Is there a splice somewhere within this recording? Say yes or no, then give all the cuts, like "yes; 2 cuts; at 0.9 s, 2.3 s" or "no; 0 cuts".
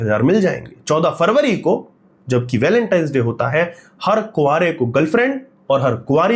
no; 0 cuts